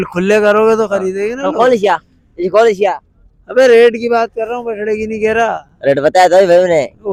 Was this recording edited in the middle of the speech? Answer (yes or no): no